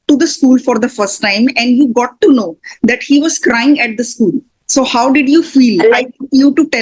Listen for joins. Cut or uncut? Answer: cut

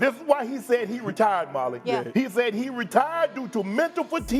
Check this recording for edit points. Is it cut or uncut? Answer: uncut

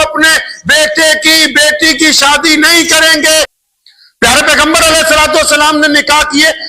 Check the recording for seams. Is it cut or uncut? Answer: cut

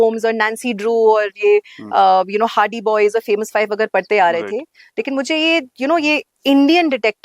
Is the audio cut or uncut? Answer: uncut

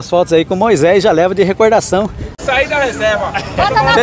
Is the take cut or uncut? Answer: cut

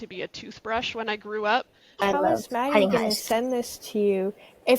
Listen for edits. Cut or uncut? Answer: cut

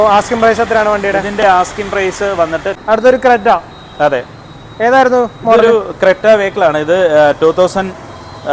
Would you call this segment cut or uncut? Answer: cut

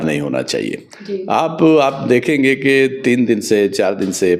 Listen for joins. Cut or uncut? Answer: uncut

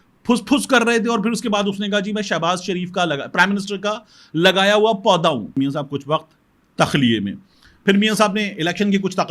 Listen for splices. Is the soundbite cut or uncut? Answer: cut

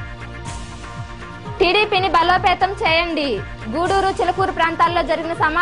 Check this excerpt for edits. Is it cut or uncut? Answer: cut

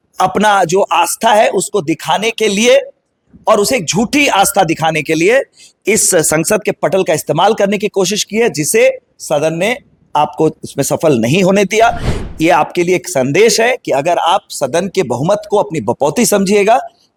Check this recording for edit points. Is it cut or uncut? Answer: uncut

